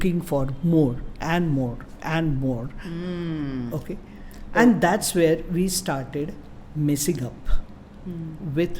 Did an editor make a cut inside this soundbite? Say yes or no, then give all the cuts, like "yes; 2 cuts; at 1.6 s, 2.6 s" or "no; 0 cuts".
no; 0 cuts